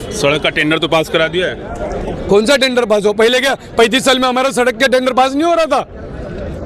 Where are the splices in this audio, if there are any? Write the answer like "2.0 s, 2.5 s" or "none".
none